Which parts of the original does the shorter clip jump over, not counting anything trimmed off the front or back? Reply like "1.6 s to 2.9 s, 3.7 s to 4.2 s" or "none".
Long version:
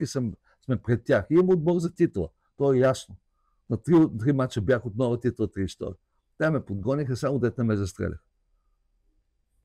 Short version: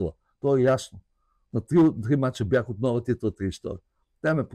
none